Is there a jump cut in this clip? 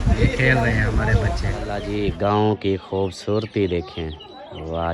yes; 1 cut; at 1.8 s

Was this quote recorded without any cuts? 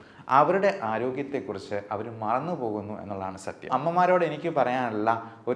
no; 1 cut; at 3.7 s

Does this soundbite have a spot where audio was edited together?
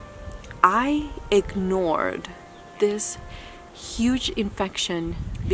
no; 0 cuts

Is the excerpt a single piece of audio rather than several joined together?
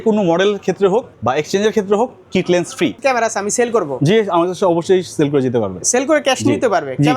no; 2 cuts; at 1.1 s, 3.0 s

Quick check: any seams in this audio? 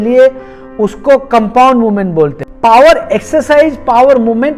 yes; 1 cut; at 2.4 s

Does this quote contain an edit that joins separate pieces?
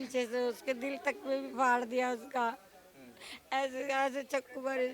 no; 0 cuts

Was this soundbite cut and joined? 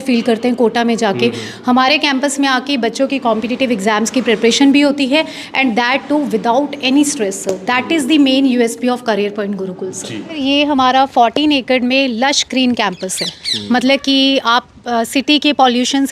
yes; 1 cut; at 10.4 s

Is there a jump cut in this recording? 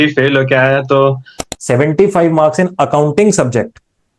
yes; 1 cut; at 1.4 s

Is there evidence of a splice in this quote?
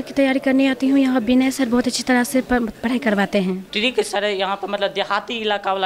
yes; 1 cut; at 3.7 s

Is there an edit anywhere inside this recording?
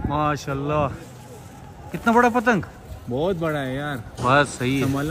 no; 0 cuts

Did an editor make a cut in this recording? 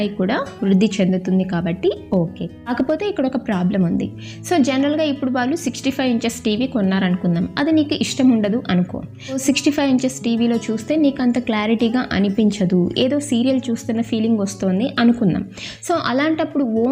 no; 0 cuts

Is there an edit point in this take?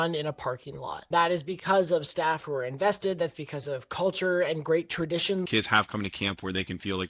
yes; 2 cuts; at 1.1 s, 5.5 s

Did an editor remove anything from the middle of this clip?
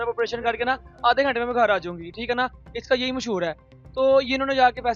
no; 0 cuts

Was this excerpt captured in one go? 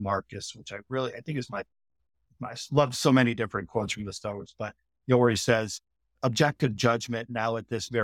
yes; 0 cuts

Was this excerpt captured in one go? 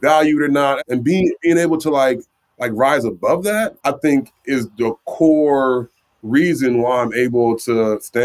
no; 2 cuts; at 0.8 s, 3.7 s

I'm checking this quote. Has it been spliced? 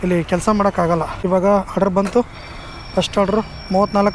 yes; 1 cut; at 1.1 s

